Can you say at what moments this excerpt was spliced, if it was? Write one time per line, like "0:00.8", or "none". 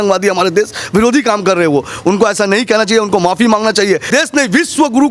0:04.1